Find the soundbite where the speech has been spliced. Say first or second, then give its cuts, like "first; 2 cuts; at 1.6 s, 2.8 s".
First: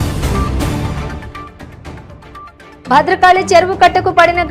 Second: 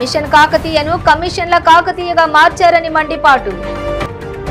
first; 1 cut; at 2.8 s